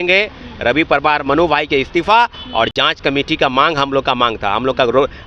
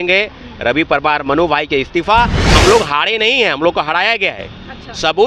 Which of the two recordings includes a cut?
second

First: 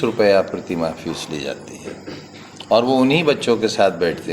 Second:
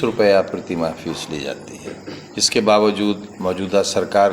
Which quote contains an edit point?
second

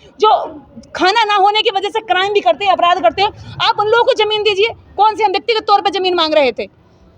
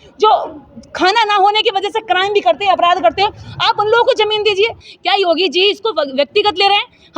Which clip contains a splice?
second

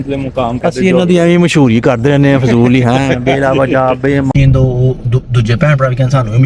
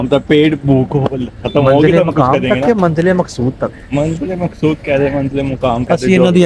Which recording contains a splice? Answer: first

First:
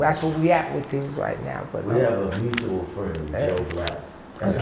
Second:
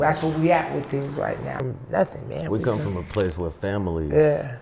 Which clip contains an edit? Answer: second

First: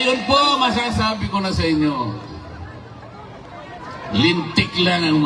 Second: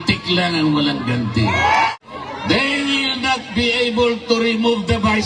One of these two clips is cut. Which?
second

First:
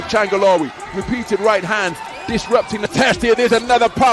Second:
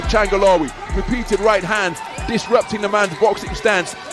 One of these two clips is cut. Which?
first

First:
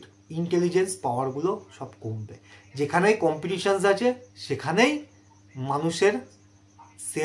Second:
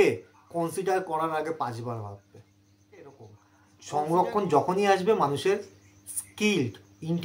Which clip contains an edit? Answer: second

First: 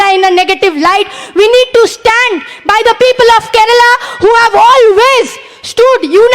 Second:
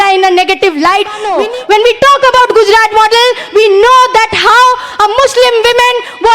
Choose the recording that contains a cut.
second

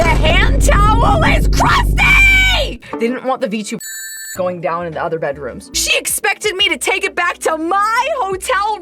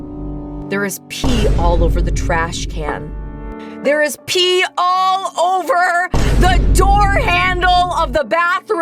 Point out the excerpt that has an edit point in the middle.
first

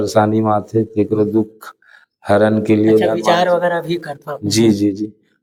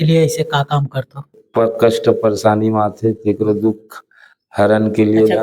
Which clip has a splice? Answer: second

